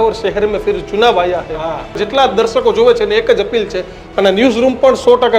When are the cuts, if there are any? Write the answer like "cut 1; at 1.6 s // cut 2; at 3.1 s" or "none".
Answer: cut 1; at 2.0 s